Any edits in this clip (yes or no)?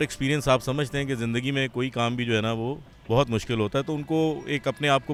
no